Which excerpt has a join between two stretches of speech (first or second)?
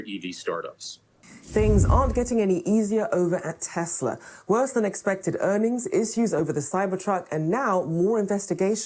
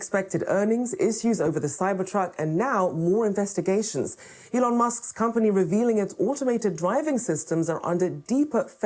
first